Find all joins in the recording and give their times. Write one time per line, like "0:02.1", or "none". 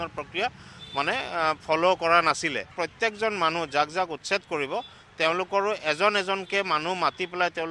0:02.7